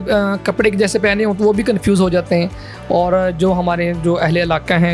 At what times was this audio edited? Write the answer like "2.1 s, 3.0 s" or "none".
none